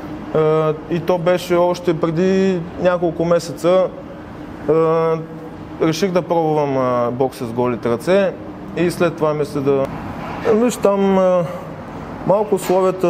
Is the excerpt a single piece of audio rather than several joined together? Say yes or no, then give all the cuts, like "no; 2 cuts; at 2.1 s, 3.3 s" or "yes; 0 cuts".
no; 1 cut; at 9.9 s